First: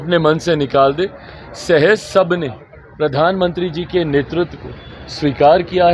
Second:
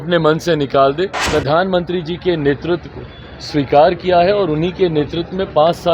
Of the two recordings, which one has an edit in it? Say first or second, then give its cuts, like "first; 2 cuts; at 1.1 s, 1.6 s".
second; 1 cut; at 1.2 s